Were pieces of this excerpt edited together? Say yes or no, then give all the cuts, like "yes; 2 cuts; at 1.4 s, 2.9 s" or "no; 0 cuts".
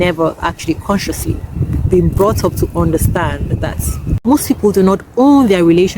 yes; 2 cuts; at 1.5 s, 4.2 s